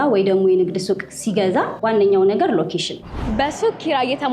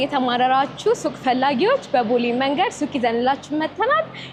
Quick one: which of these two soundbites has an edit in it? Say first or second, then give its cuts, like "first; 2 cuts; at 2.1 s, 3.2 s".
first; 2 cuts; at 1.7 s, 3.0 s